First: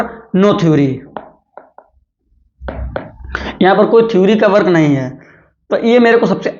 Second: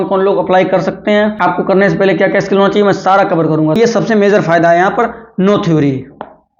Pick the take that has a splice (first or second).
second